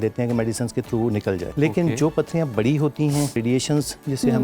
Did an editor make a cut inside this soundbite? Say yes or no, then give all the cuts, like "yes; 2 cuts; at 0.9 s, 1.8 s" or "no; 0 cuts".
yes; 2 cuts; at 1.5 s, 3.4 s